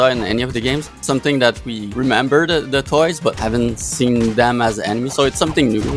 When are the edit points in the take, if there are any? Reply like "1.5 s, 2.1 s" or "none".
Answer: 1.0 s, 1.8 s, 3.4 s